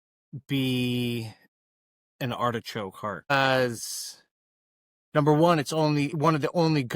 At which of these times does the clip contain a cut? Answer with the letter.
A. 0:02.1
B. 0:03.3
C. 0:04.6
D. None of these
B